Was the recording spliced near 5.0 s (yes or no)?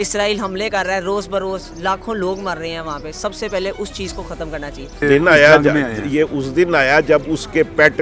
yes